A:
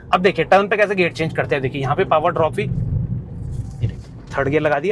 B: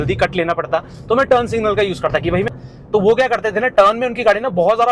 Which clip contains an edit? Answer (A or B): B